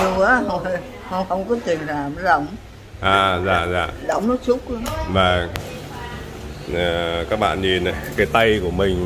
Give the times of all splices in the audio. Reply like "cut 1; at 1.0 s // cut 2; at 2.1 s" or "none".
cut 1; at 5.6 s